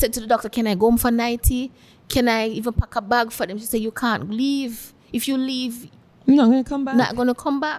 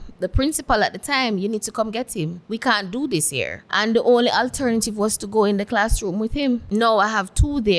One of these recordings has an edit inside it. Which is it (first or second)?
second